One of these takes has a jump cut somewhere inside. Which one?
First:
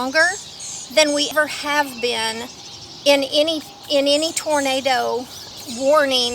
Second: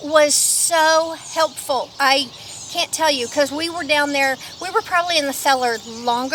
first; 2 cuts; at 1.3 s, 5.4 s

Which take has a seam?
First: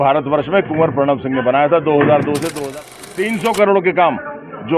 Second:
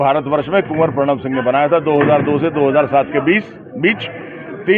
first; 1 cut; at 2.5 s

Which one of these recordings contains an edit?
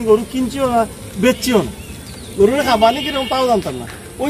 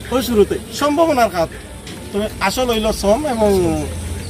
first; 1 cut; at 2.1 s

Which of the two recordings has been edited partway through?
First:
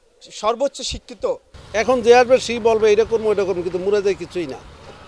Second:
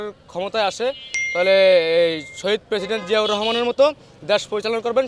first; 1 cut; at 1.5 s

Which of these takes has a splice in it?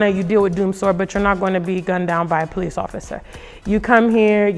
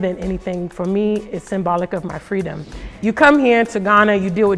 second; 1 cut; at 2.9 s

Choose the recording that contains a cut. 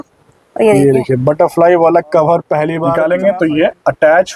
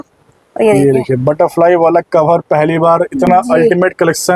first; 1 cut; at 2.8 s

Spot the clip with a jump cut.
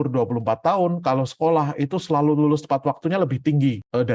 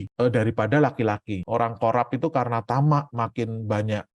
second; 1 cut; at 1.4 s

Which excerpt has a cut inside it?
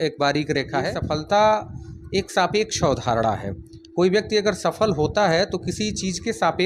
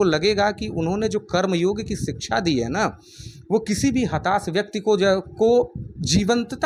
first; 1 cut; at 1.0 s

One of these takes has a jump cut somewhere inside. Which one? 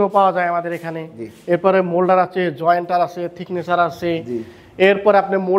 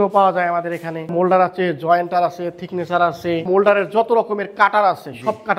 second; 2 cuts; at 1.1 s, 3.5 s

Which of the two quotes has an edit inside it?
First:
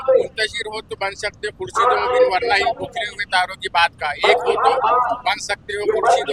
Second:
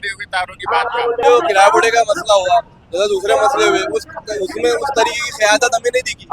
second; 1 cut; at 1.2 s

